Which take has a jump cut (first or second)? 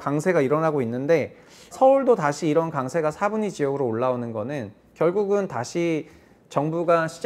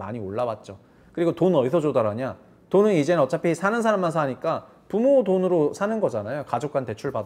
first